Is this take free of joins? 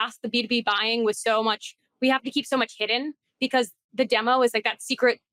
yes; 0 cuts

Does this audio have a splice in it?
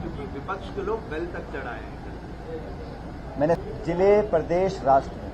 yes; 1 cut; at 3.6 s

